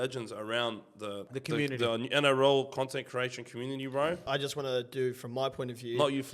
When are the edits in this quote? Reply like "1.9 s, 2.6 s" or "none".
1.3 s, 4.2 s